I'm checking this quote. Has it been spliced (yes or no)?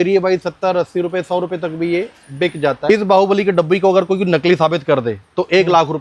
yes